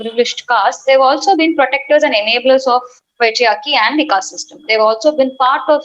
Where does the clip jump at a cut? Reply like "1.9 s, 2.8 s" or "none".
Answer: none